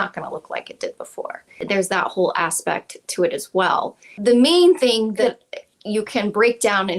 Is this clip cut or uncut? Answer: cut